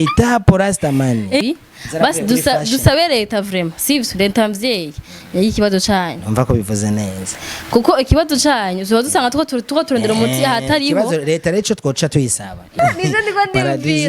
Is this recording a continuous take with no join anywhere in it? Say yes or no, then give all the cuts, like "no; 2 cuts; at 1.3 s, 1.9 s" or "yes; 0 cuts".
no; 2 cuts; at 1.4 s, 12.8 s